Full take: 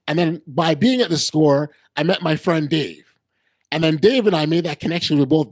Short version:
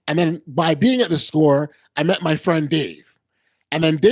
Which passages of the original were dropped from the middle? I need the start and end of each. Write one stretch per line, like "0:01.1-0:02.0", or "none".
none